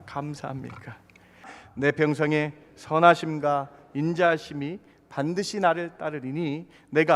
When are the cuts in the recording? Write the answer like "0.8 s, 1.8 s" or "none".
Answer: 1.5 s

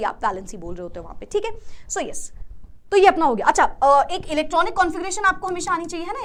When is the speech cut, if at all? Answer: none

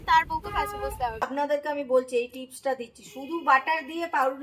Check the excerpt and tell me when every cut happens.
1.3 s

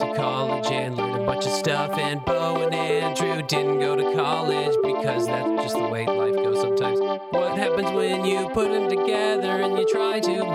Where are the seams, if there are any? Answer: none

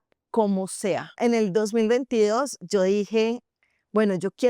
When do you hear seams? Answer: 1.1 s

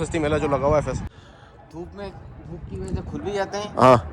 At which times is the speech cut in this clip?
1.1 s

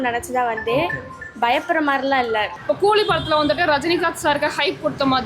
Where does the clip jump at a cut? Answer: 2.5 s

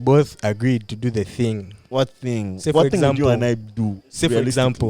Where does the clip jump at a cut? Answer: 1.8 s

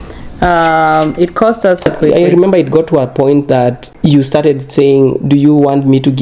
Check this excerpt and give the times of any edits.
1.9 s, 3.9 s

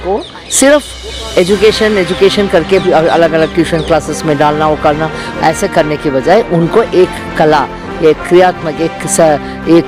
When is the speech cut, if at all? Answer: none

